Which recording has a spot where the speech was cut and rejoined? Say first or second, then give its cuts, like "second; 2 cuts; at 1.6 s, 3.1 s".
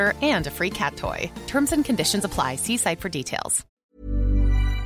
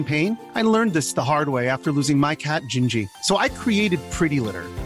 first; 1 cut; at 3.8 s